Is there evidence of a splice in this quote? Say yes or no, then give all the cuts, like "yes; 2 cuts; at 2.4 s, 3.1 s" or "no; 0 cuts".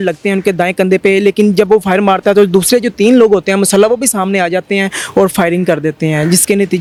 no; 0 cuts